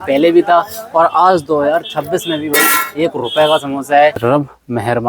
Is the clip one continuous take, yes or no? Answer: no